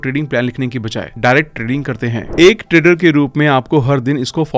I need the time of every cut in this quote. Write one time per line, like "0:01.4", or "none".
0:02.2